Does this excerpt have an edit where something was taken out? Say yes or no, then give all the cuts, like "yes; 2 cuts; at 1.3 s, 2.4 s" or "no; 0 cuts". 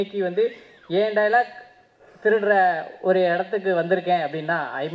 no; 0 cuts